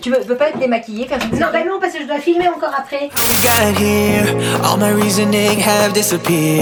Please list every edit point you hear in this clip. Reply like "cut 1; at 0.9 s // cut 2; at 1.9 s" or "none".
none

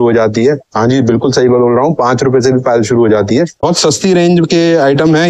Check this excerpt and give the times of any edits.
cut 1; at 3.6 s

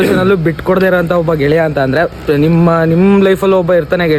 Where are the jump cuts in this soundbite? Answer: none

